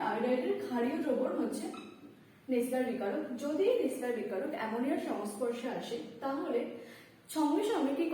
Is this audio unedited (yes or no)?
yes